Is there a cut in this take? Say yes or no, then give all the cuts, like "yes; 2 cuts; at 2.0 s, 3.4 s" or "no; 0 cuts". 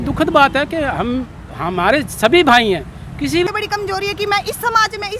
yes; 1 cut; at 3.5 s